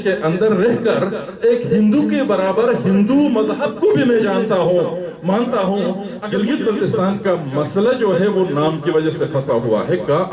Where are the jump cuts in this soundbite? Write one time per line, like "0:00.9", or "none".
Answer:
0:06.1